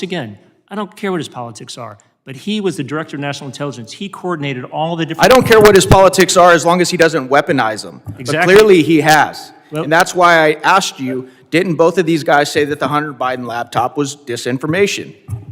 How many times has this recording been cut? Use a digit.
0